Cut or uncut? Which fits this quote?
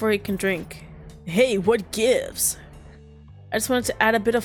uncut